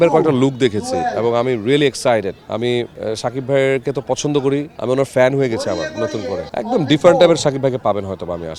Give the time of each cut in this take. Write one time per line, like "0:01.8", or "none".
none